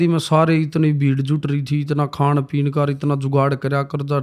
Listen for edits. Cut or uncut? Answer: uncut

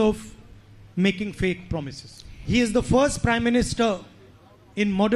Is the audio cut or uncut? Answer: cut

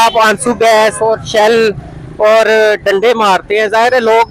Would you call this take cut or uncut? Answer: uncut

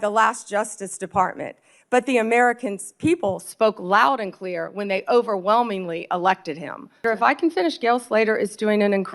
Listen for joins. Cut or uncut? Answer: cut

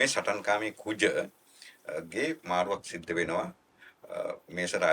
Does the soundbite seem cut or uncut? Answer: uncut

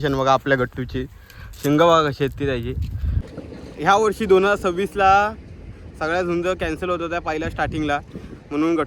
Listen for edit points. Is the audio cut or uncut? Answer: cut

